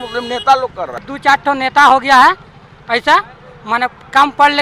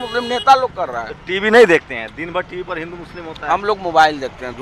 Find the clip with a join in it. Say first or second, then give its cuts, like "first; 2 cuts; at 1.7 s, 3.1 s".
first; 1 cut; at 1.1 s